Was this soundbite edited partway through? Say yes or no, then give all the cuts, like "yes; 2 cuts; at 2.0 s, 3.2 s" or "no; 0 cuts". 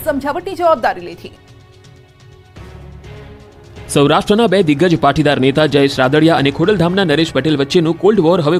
no; 0 cuts